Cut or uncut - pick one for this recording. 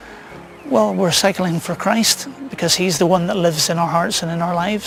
uncut